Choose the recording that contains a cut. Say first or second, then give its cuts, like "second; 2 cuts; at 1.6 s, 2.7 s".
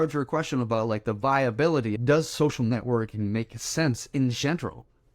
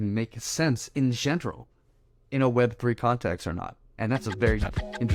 first; 1 cut; at 1.9 s